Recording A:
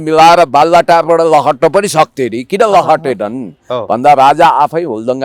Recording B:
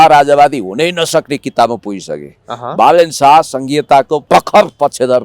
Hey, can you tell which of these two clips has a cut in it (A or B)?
B